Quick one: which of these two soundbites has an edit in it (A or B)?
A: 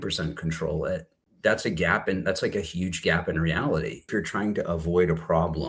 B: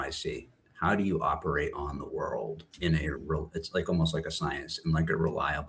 A